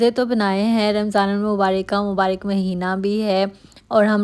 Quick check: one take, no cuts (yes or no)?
yes